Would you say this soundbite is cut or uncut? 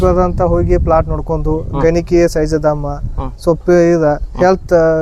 uncut